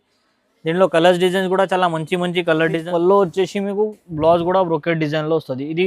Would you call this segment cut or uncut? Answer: cut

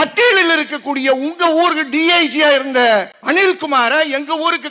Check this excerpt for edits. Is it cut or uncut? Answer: cut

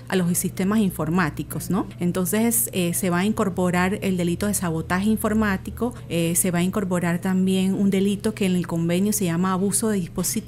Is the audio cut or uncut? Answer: cut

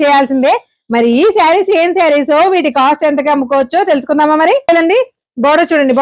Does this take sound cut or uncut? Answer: cut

